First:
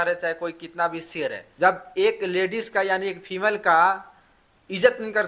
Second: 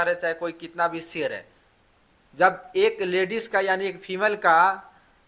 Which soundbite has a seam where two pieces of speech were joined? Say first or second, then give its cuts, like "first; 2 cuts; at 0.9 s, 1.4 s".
first; 1 cut; at 1.4 s